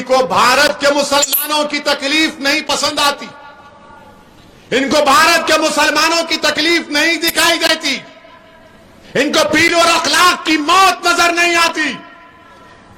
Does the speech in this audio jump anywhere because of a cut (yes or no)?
no